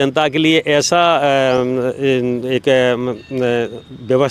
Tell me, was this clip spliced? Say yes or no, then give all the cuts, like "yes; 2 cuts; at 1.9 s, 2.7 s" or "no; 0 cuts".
no; 0 cuts